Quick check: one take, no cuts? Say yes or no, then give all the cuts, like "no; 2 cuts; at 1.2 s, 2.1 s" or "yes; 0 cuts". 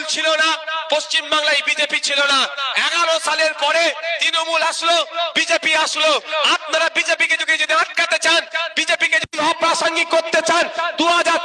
yes; 0 cuts